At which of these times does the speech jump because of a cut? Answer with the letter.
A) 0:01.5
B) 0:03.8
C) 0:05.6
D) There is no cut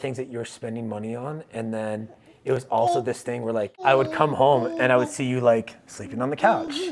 B